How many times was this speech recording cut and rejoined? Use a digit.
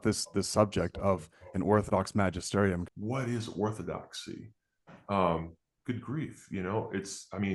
1